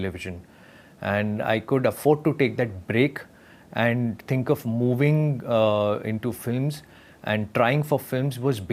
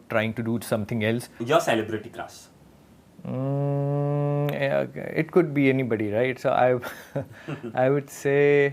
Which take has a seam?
second; 1 cut; at 1.4 s

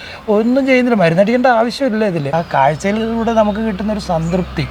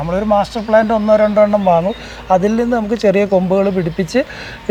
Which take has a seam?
first; 1 cut; at 2.3 s

